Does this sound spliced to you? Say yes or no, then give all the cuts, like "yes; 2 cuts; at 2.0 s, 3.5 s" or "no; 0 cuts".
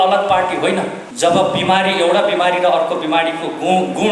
yes; 1 cut; at 1.0 s